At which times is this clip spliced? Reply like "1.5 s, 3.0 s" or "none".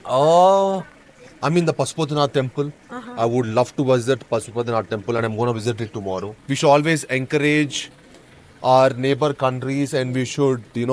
6.3 s

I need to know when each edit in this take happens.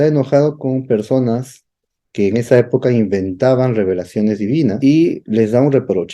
4.8 s

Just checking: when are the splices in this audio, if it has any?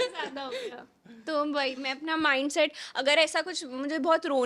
none

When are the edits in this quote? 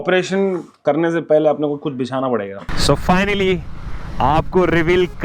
2.7 s

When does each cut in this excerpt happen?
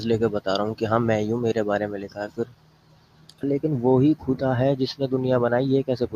3.4 s

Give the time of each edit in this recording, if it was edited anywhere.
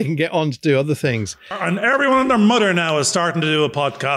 1.6 s

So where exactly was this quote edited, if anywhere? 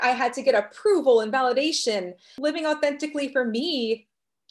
none

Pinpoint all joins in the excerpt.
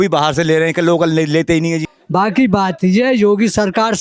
1.9 s

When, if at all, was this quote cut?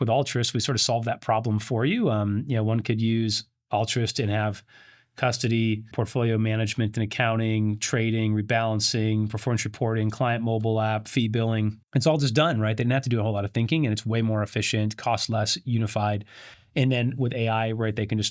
5.9 s, 11.8 s

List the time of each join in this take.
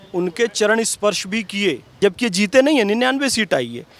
1.9 s

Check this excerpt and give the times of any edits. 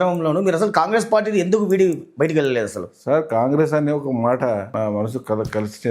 4.7 s

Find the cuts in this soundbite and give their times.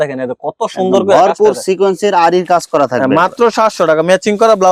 none

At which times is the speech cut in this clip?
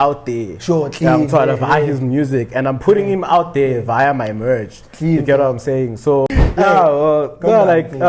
6.3 s

